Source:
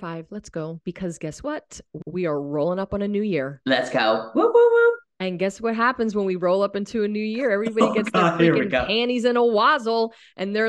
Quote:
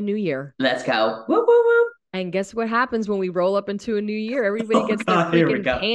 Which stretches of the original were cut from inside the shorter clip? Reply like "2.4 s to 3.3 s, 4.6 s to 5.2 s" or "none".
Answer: none